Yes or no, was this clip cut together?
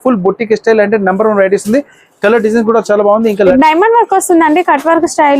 yes